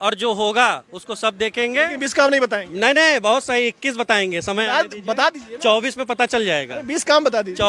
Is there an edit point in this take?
no; 0 cuts

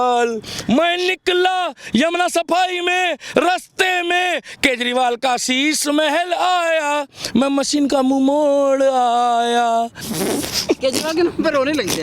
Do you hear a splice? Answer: yes; 1 cut; at 10.0 s

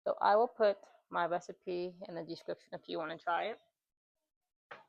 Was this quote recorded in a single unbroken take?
yes; 0 cuts

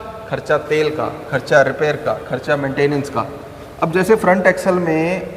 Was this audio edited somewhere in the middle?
no; 0 cuts

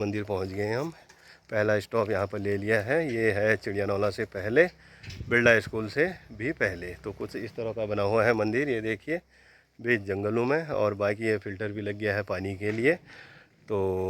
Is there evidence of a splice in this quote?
no; 0 cuts

